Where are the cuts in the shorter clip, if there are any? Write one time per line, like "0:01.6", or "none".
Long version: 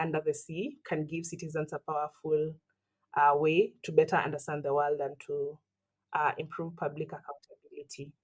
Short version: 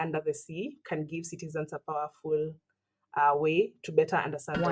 none

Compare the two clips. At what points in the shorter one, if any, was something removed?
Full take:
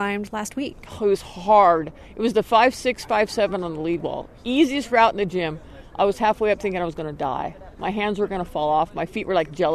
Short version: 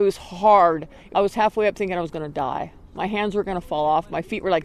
0:00.9

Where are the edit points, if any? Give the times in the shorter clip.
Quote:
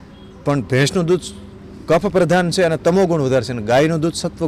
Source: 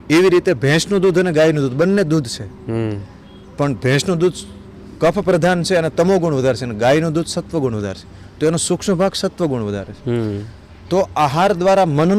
none

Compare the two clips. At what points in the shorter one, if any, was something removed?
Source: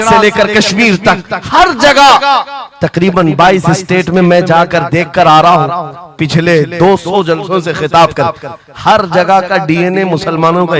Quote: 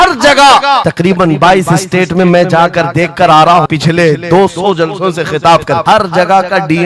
0:00.9
0:03.7
0:05.8

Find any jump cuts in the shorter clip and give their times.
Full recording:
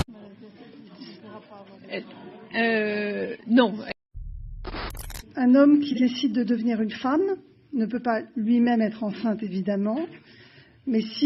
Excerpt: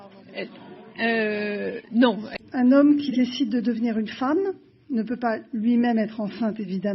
0:02.4

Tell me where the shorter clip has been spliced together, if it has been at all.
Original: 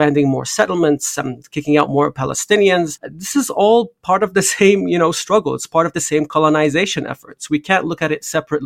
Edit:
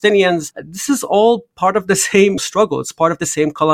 0:02.4

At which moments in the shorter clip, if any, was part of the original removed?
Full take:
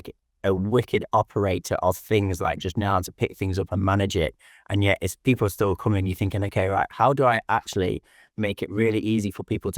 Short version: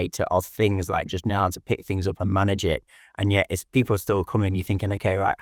none

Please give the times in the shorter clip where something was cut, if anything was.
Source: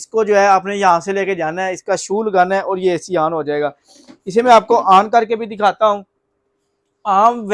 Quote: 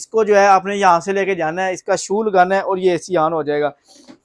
none

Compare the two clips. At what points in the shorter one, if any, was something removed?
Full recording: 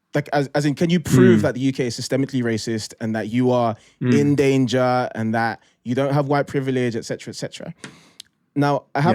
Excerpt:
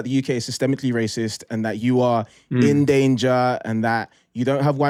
none

